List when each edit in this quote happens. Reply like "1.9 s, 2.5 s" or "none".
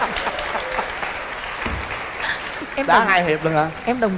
none